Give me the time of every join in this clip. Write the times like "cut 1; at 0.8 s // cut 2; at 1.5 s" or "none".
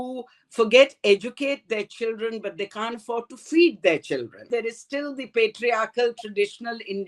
cut 1; at 4.5 s